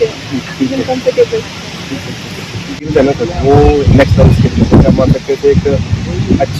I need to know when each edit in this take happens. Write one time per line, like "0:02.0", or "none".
0:02.8